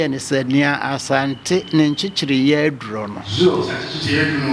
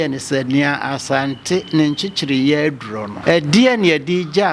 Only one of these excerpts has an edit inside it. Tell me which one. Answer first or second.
second